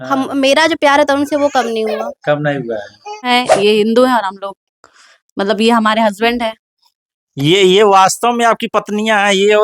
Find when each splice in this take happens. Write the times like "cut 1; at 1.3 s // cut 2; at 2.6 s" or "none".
cut 1; at 3.3 s